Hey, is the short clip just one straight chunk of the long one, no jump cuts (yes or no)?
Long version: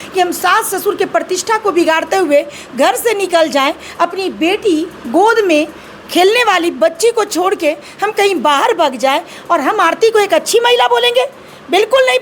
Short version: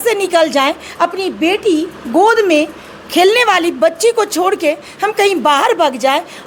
yes